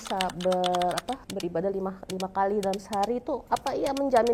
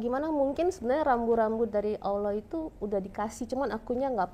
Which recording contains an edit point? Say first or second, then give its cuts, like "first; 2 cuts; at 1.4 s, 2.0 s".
first; 2 cuts; at 1.3 s, 3.4 s